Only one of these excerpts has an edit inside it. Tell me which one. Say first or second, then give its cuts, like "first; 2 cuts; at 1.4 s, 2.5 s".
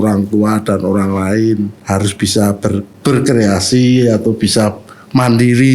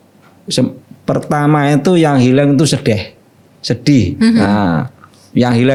first; 2 cuts; at 1.8 s, 2.9 s